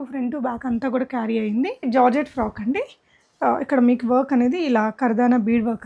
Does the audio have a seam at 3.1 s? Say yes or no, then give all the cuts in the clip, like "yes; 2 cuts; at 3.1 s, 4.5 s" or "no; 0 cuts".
no; 1 cut; at 1.8 s